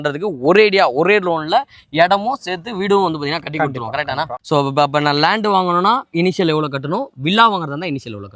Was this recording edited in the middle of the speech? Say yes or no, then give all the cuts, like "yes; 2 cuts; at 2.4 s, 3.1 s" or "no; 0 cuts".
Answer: yes; 1 cut; at 4.4 s